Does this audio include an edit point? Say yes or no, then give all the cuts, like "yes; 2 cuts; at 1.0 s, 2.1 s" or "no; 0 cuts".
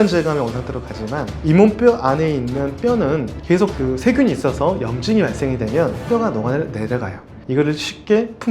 no; 0 cuts